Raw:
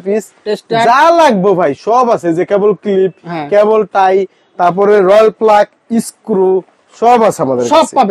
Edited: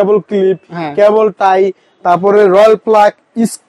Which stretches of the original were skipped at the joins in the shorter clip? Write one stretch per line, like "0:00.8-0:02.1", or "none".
none

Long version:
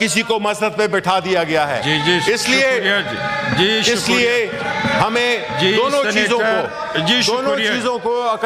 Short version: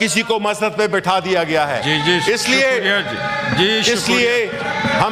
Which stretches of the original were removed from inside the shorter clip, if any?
none

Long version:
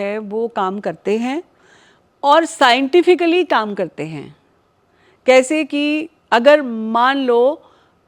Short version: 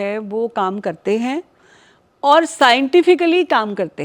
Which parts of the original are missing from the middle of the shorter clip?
none

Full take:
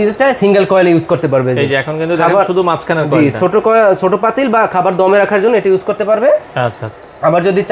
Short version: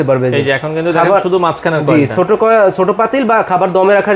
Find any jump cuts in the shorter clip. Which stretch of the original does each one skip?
none

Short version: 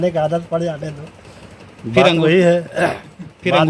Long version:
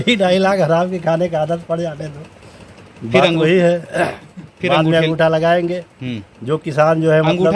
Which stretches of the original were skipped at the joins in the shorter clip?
none

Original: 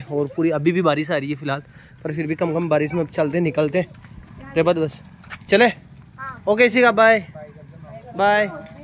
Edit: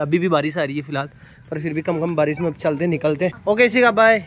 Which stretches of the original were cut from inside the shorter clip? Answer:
0:03.9-0:06.4

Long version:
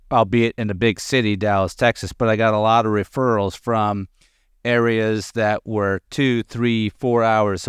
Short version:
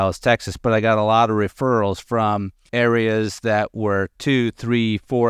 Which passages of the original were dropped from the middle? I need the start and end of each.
0:04.1-0:04.5

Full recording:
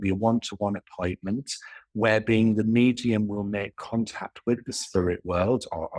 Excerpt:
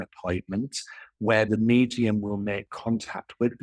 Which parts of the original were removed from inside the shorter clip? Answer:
0:02.2-0:02.6

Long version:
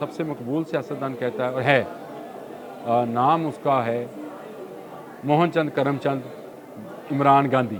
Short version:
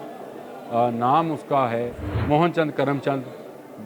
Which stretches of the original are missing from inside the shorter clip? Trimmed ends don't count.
0:04.2-0:05.1

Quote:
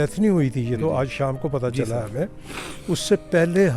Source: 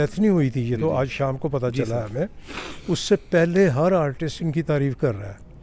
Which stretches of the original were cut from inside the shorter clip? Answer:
none

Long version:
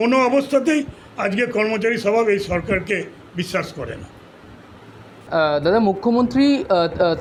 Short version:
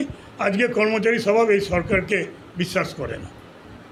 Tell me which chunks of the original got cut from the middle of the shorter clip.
none

